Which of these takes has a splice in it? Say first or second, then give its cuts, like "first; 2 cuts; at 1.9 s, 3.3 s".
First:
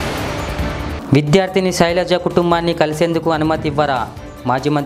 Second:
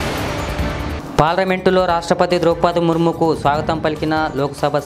first; 1 cut; at 0.9 s